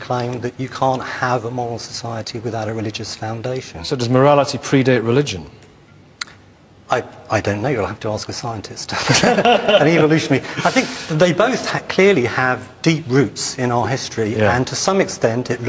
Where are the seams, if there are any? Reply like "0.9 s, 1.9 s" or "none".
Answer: 8.1 s